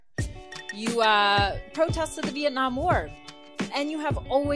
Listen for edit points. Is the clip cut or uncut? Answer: cut